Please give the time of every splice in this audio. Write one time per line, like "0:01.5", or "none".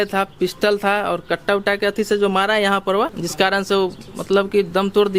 0:03.2